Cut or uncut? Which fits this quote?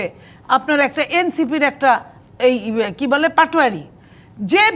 uncut